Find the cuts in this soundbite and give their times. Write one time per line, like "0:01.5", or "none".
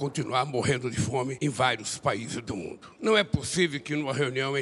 0:01.3
0:02.8